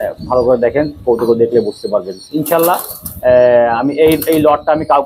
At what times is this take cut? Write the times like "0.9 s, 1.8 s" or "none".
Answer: none